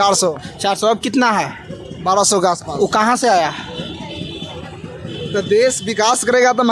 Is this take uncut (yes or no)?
yes